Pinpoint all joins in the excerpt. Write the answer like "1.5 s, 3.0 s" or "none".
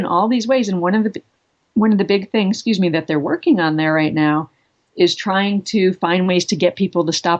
none